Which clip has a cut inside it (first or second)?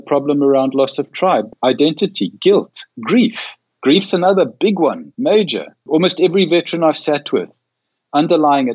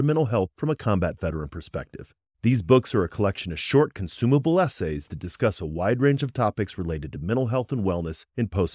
first